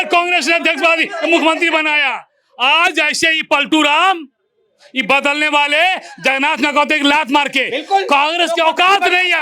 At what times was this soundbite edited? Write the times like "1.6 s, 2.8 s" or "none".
none

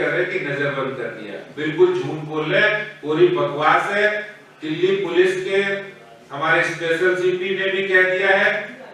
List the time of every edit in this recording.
none

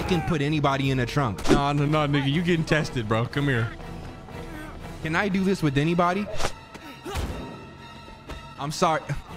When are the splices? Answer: 1.4 s

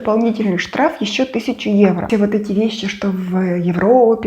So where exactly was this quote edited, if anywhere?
2.0 s

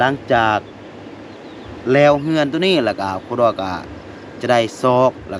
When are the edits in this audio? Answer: none

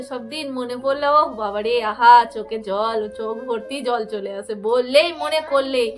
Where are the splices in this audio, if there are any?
none

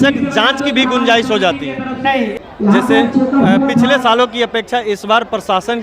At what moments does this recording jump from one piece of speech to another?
2.3 s

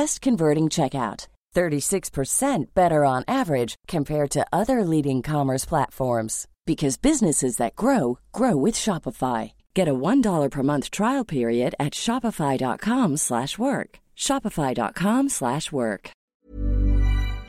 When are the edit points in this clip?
16.3 s

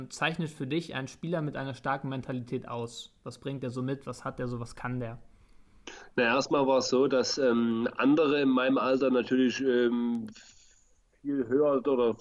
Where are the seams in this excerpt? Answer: none

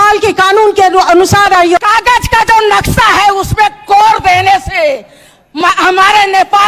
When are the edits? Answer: 1.8 s

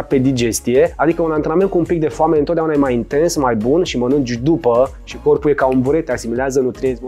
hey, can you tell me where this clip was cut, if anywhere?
0.9 s

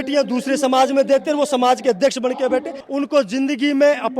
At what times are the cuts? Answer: 2.8 s

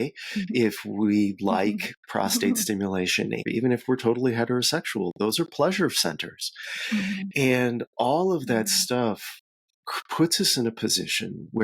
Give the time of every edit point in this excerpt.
3.4 s

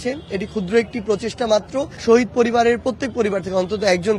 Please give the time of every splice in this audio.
1.9 s

